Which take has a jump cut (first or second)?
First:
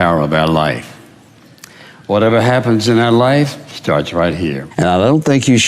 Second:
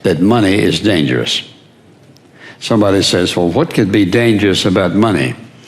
first